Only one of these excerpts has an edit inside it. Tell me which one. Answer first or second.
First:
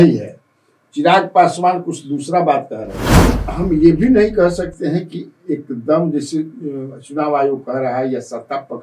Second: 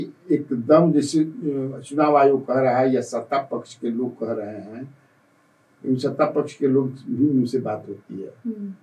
first